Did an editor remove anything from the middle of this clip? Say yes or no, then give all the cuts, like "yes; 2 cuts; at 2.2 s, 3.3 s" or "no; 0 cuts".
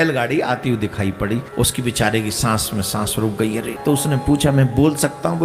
yes; 2 cuts; at 1.5 s, 3.7 s